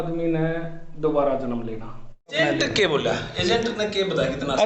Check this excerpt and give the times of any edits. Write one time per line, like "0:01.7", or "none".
0:02.4